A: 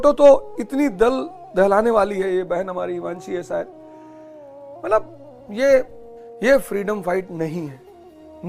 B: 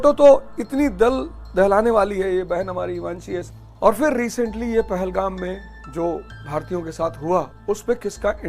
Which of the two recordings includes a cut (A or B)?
B